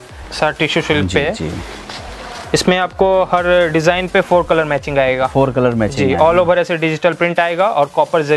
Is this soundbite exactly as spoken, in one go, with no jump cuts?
yes; 0 cuts

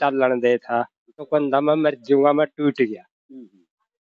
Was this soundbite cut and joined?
yes; 1 cut; at 1.3 s

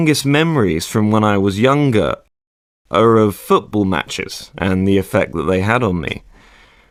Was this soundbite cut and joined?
no; 0 cuts

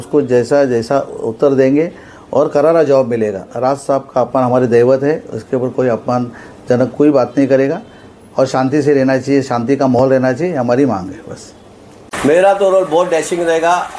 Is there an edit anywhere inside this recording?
yes; 1 cut; at 12.1 s

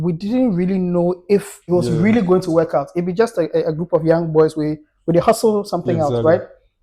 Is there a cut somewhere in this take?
yes; 1 cut; at 1.5 s

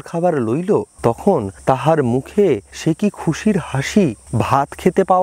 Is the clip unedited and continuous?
no; 3 cuts; at 1.4 s, 2.7 s, 4.2 s

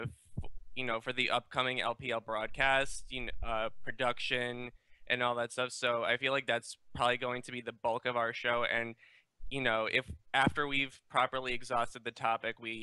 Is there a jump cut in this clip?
yes; 1 cut; at 10.8 s

